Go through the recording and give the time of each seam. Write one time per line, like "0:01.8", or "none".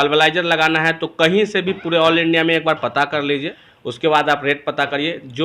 0:03.6